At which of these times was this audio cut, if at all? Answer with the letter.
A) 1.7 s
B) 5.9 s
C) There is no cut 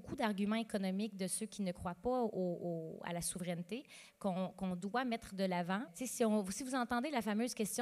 B